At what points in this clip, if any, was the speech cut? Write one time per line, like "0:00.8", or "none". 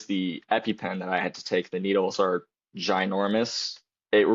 none